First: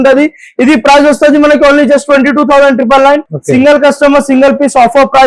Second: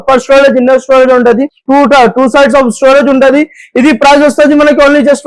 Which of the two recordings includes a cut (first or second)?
first